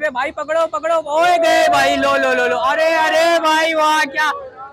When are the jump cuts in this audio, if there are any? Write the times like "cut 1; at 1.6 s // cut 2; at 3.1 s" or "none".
none